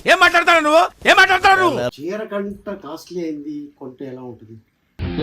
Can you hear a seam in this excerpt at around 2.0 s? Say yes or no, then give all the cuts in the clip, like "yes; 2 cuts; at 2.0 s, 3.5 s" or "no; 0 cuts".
yes; 1 cut; at 2.0 s